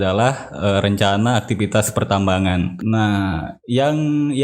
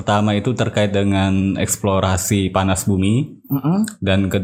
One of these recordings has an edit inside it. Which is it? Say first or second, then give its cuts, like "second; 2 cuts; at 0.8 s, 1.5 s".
first; 1 cut; at 2.7 s